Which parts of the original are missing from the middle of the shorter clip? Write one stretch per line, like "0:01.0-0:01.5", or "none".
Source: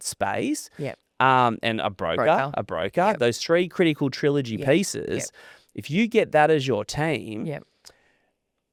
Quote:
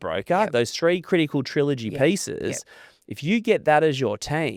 none